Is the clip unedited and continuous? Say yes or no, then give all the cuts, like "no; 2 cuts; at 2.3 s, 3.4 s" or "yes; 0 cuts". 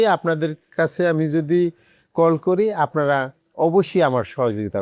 yes; 0 cuts